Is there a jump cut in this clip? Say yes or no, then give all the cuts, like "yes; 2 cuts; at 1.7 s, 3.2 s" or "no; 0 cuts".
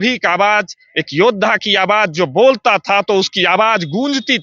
no; 0 cuts